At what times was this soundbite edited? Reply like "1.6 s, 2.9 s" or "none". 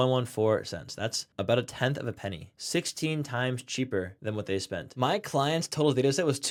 none